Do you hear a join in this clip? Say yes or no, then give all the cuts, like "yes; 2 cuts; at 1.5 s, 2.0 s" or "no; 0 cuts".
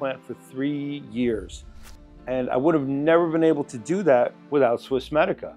no; 0 cuts